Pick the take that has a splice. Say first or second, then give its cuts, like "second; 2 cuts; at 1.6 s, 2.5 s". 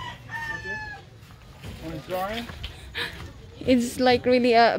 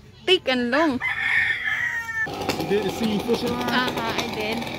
second; 1 cut; at 2.3 s